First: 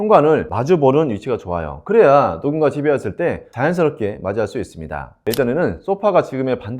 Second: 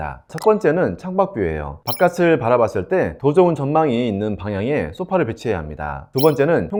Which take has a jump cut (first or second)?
first